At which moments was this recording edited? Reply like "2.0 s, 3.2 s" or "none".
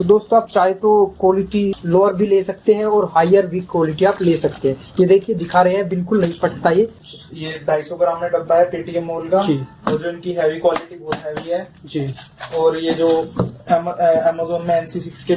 1.8 s, 7.0 s